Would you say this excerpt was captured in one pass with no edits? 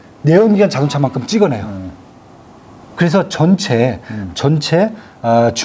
yes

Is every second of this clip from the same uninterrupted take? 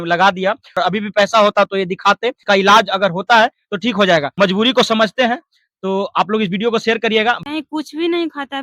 no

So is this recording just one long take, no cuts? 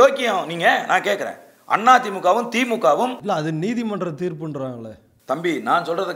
yes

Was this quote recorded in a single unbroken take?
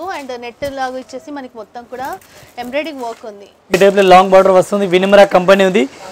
no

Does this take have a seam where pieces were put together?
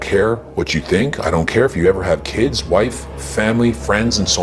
no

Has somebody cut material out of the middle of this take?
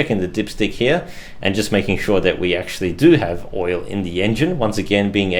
no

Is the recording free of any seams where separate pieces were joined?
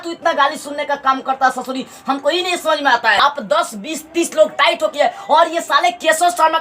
no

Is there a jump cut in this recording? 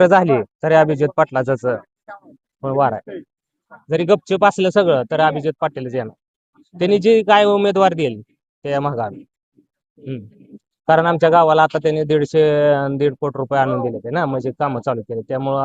no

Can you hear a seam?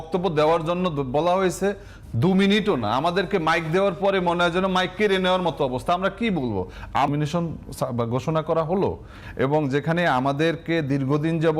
yes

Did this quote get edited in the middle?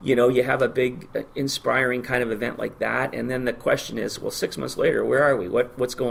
no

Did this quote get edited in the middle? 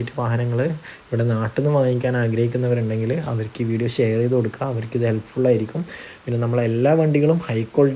no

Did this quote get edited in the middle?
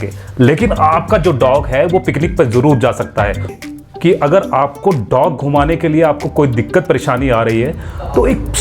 yes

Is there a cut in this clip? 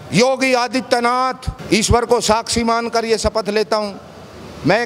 yes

